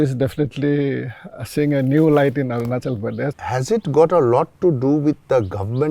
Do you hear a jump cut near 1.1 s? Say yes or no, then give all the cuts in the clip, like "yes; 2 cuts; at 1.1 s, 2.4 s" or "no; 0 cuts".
no; 1 cut; at 3.4 s